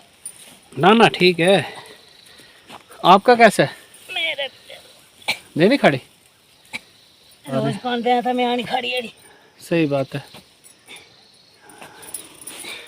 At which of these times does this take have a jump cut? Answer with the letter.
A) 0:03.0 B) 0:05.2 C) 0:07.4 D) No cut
C